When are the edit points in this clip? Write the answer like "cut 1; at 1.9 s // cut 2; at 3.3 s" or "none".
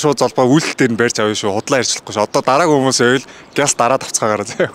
none